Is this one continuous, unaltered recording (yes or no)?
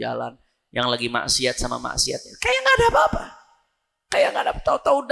yes